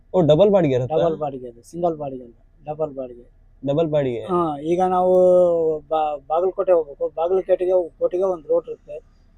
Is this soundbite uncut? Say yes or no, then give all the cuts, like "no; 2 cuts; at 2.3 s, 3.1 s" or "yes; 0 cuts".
yes; 0 cuts